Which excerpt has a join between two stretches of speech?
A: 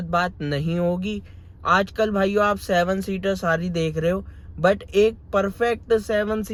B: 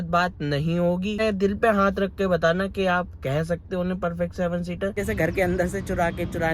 B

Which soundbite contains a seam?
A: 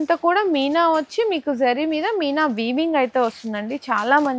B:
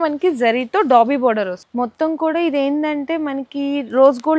B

